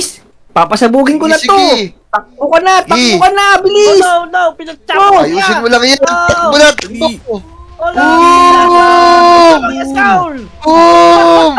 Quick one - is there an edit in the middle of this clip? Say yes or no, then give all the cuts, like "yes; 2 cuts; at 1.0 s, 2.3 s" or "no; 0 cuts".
no; 0 cuts